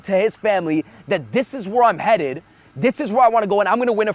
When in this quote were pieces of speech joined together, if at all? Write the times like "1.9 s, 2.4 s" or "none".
none